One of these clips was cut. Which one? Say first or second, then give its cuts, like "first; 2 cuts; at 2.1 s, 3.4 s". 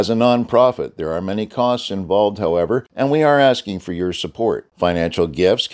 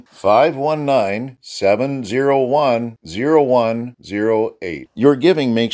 first; 1 cut; at 2.9 s